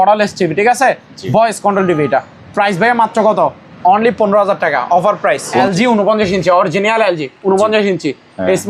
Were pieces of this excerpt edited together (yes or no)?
yes